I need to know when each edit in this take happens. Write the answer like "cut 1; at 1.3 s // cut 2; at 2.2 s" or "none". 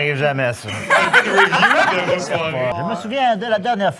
cut 1; at 2.7 s